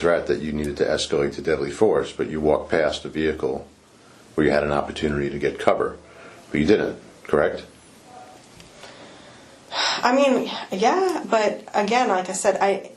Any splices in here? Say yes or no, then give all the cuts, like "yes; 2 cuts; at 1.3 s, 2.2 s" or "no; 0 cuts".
no; 0 cuts